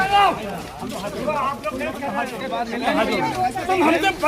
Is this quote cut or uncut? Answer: cut